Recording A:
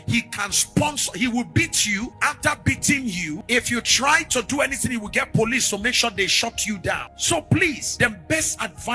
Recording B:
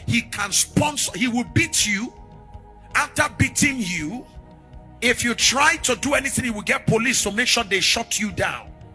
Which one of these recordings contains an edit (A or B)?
A